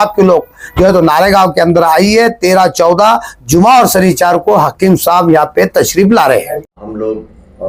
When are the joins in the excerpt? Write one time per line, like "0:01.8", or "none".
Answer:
0:06.6